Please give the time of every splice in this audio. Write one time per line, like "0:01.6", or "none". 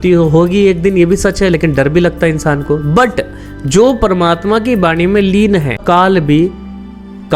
0:05.8